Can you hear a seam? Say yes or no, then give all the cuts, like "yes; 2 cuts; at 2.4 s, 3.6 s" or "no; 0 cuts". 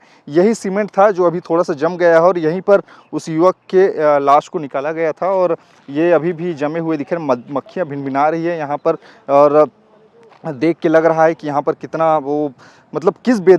no; 0 cuts